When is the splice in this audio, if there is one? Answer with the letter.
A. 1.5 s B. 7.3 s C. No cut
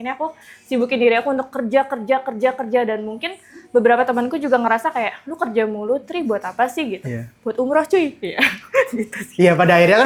C